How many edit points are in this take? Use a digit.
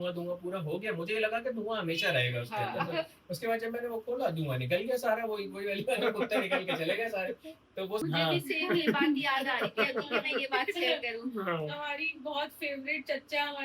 1